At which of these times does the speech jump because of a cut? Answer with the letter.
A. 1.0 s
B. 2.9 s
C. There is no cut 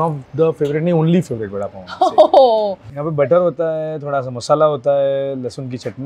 B